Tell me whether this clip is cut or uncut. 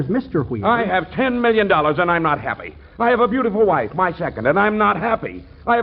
uncut